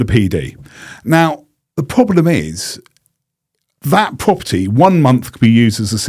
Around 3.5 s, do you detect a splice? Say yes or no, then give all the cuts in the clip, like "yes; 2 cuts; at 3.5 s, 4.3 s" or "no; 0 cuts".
no; 0 cuts